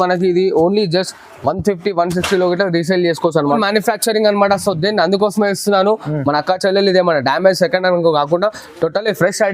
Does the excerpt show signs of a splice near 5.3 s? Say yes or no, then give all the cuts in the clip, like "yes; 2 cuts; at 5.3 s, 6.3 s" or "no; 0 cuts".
no; 1 cut; at 3.5 s